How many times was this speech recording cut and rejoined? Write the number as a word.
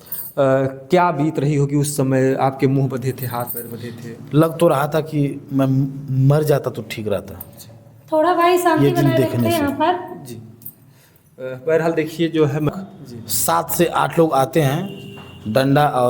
one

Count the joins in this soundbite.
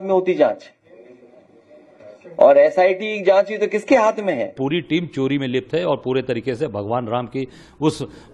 one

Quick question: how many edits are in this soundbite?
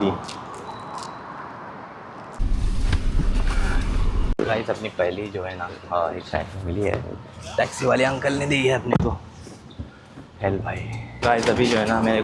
one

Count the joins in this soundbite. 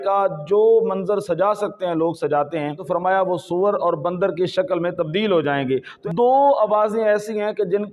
two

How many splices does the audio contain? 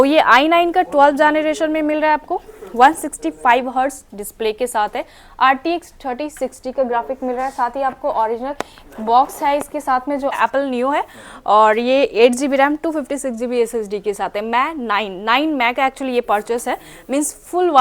one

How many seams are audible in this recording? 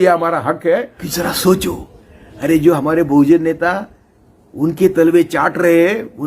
one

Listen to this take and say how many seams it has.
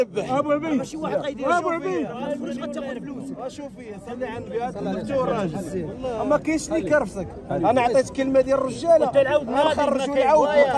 zero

